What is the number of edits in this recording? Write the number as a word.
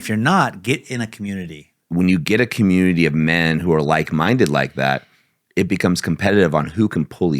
one